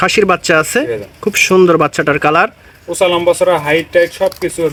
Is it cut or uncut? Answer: uncut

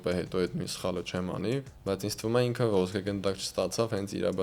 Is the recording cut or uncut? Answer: cut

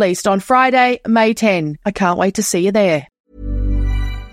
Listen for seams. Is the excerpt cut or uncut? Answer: cut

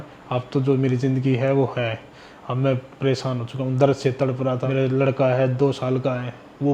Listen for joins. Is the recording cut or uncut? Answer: cut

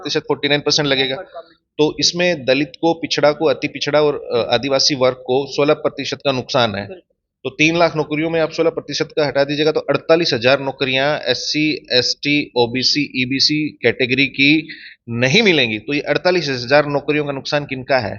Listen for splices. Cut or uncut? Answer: uncut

